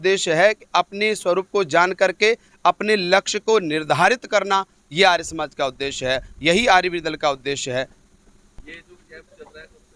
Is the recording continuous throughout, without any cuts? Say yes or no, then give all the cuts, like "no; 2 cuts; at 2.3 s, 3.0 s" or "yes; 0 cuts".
yes; 0 cuts